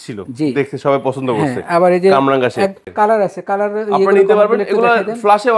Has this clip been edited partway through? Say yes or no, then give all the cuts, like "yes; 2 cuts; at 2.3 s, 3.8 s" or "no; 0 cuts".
yes; 1 cut; at 2.8 s